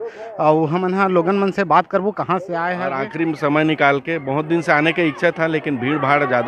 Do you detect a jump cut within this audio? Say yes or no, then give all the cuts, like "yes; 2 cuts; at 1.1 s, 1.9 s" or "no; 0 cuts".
yes; 1 cut; at 2.8 s